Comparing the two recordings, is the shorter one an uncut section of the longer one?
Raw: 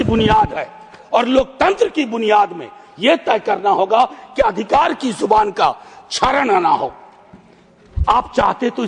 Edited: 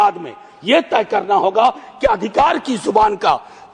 yes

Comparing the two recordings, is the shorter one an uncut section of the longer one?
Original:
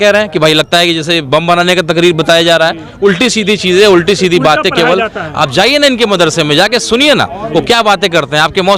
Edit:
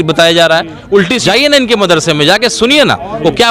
no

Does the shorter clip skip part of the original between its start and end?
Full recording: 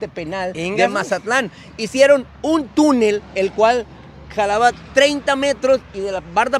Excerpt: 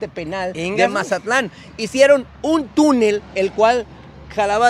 no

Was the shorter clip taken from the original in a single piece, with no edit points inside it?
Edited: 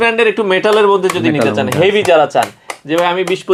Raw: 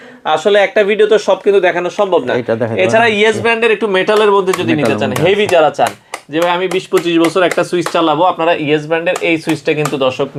yes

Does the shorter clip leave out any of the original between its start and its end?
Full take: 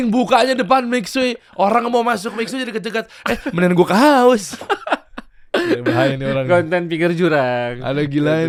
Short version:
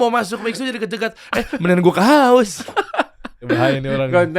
yes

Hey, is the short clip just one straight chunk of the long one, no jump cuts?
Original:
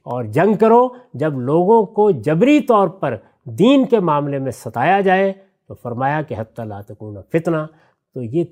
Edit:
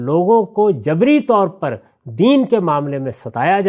yes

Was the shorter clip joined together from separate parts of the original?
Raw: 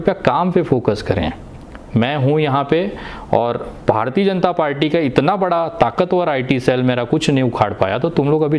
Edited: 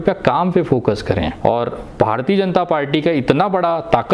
yes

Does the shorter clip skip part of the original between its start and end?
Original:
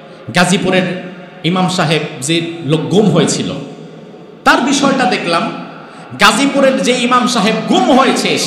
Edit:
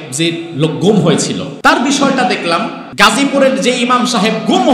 yes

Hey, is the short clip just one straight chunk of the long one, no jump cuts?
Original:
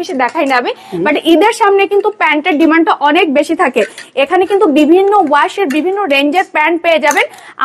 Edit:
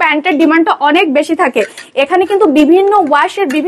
yes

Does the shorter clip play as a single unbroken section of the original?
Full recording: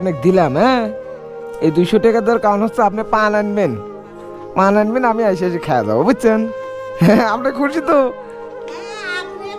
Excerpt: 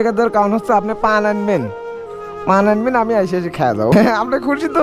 no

